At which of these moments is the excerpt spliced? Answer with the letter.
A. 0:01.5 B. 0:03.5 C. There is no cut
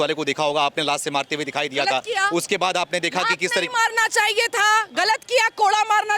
C